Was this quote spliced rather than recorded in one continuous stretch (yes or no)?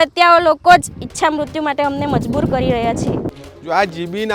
yes